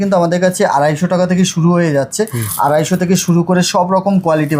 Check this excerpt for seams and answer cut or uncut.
uncut